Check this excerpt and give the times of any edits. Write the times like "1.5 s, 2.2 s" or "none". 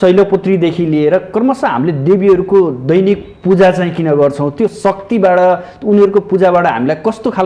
none